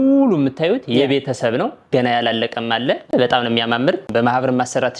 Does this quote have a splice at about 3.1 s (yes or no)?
yes